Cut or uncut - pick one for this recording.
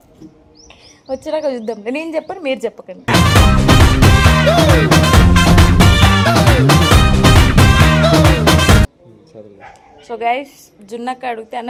uncut